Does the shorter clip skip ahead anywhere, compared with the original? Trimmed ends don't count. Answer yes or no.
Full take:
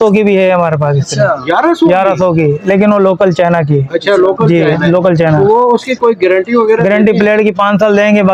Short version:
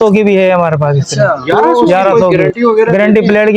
yes